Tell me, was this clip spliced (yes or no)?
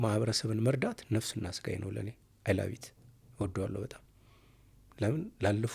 no